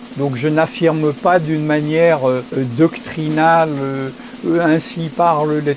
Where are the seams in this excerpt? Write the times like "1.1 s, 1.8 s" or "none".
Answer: 2.5 s